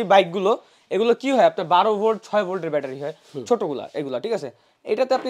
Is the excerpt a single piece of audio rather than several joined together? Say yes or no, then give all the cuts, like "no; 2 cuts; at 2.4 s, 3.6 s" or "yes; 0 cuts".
yes; 0 cuts